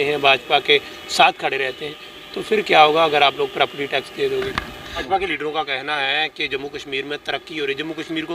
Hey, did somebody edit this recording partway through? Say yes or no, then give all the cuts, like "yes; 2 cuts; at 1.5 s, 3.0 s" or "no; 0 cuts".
yes; 1 cut; at 5.0 s